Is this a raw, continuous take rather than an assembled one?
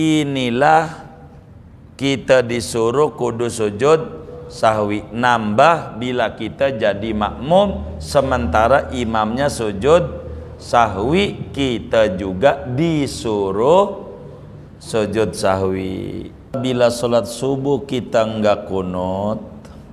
no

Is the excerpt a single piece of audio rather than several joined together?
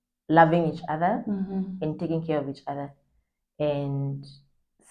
yes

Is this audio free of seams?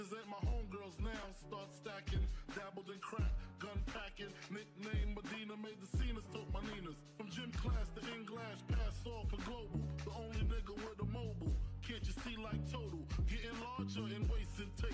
yes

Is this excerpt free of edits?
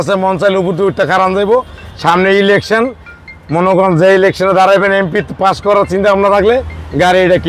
yes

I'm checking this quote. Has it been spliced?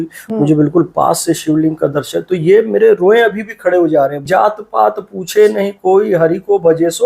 yes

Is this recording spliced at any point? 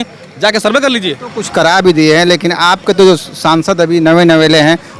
yes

